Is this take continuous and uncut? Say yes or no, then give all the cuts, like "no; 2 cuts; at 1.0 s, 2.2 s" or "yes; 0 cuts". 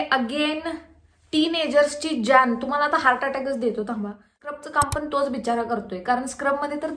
no; 1 cut; at 4.6 s